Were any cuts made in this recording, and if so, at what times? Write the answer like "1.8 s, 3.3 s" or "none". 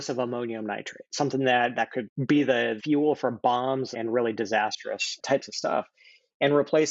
2.8 s, 3.9 s